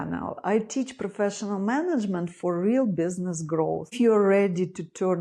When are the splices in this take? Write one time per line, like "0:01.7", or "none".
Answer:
0:03.9